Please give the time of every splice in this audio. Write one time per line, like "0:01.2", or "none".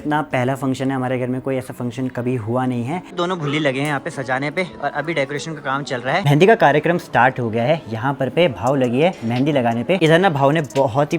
0:03.1
0:06.2
0:10.0